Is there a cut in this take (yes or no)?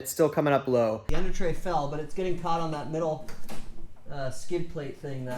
yes